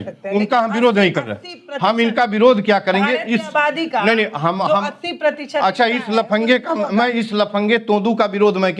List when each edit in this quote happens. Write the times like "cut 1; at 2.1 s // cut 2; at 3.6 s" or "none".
none